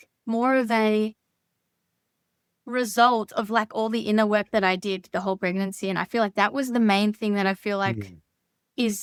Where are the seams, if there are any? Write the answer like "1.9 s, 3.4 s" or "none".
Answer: none

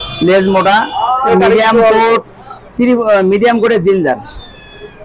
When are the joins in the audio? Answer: 1.3 s

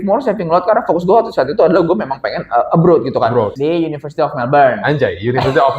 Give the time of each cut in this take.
3.5 s

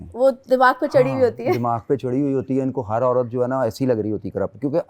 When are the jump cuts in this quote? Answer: none

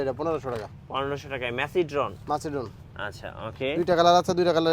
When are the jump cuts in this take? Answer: none

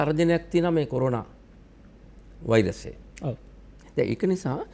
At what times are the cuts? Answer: none

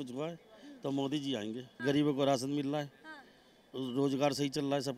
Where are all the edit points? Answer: 1.7 s

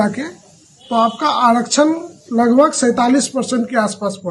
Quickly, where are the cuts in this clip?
none

